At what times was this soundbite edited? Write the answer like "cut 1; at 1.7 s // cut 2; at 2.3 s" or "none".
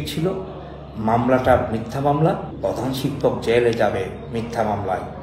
cut 1; at 2.5 s